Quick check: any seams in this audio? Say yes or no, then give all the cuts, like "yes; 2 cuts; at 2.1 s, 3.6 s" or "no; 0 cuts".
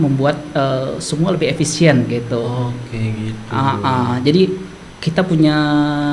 no; 0 cuts